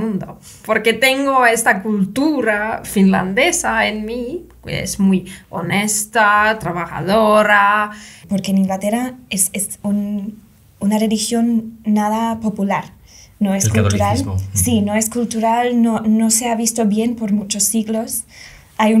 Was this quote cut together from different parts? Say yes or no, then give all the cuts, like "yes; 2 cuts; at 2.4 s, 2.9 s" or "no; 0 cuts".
yes; 1 cut; at 8.2 s